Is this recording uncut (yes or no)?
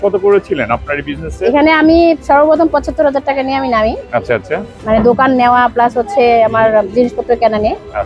yes